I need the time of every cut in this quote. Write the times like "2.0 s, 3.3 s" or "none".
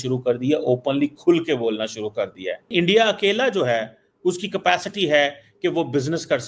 2.7 s